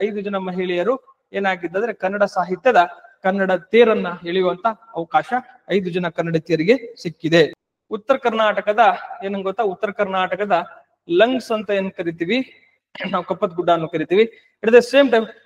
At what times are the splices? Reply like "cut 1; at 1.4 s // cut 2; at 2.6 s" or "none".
cut 1; at 7.5 s